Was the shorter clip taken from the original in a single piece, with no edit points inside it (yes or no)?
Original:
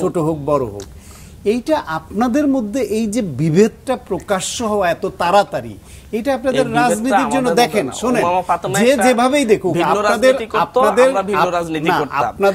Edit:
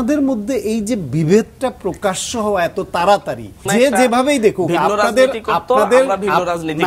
no